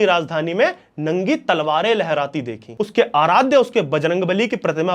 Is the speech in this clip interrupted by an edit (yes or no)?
yes